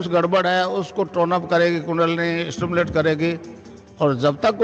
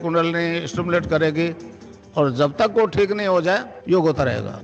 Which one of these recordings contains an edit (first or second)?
second